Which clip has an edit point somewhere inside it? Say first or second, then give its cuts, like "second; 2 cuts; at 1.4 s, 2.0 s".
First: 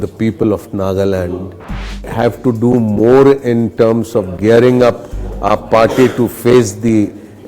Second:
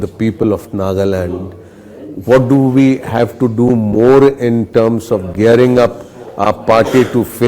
first; 1 cut; at 2.1 s